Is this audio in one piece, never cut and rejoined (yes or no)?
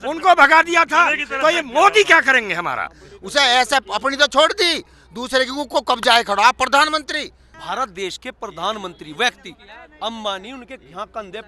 no